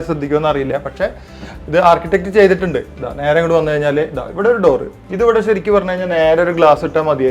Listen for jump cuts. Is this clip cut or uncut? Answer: uncut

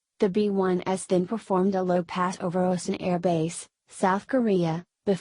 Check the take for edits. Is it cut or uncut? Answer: cut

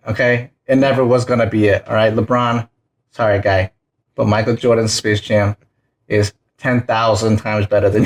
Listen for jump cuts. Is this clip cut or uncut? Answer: uncut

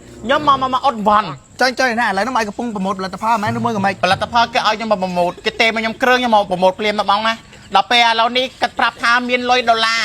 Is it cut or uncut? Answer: cut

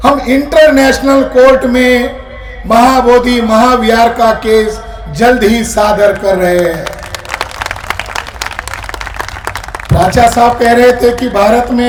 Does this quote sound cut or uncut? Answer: uncut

